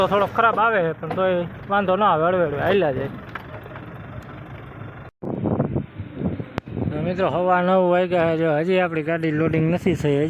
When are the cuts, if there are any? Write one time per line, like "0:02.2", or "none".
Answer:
0:05.1